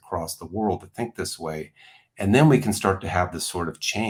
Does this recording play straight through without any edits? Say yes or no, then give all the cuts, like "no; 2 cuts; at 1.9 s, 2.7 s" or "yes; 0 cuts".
yes; 0 cuts